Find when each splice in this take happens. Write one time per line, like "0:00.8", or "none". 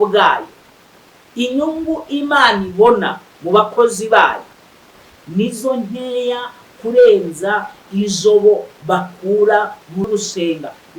0:10.0